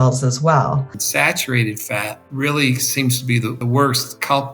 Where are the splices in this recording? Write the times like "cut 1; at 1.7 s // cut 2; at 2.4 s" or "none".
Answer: cut 1; at 1.0 s // cut 2; at 2.2 s // cut 3; at 3.6 s

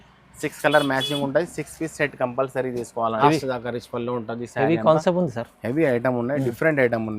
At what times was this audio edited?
cut 1; at 3.2 s

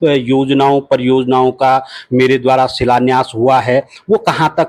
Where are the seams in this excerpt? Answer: none

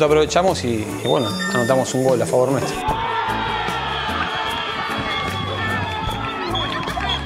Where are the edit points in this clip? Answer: none

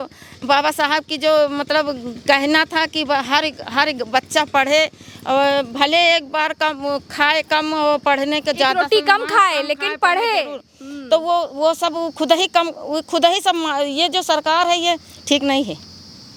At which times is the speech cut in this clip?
none

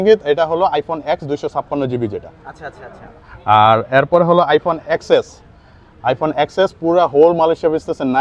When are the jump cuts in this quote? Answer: none

